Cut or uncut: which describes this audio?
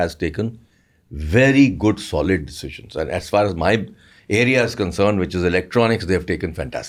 uncut